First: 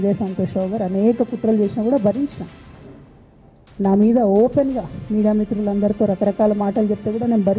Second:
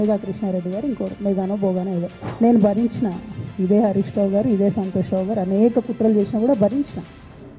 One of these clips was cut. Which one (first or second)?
second